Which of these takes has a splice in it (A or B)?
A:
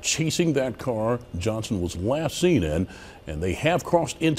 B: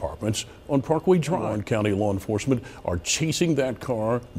B